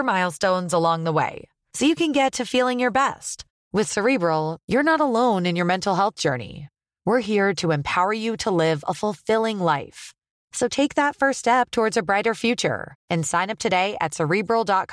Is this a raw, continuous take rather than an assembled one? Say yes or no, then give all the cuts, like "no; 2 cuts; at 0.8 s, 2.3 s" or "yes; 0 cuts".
yes; 0 cuts